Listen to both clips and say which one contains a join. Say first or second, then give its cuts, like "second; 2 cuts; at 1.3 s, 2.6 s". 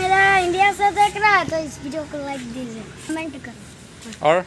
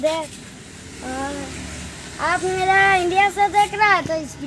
first; 1 cut; at 3.1 s